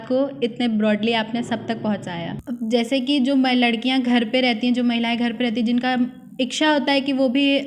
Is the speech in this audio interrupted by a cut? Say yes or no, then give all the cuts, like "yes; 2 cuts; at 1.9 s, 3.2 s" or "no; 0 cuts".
yes; 1 cut; at 2.4 s